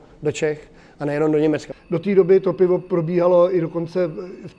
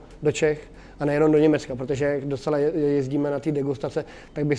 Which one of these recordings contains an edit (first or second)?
first